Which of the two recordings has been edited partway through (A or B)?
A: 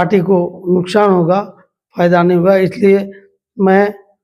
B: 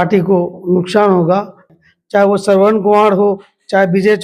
B